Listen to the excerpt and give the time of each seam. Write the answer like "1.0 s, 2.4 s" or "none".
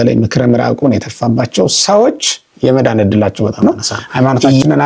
3.6 s